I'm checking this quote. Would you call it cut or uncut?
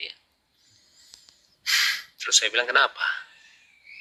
uncut